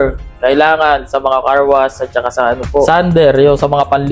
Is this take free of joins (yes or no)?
no